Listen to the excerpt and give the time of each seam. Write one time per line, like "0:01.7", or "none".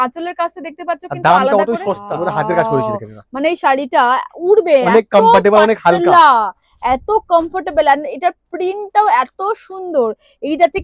0:02.1